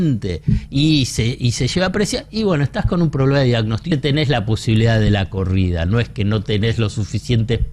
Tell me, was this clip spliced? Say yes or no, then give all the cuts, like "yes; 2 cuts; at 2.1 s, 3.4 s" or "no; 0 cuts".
yes; 1 cut; at 3.9 s